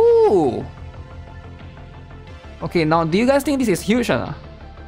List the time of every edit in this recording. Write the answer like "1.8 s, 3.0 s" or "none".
none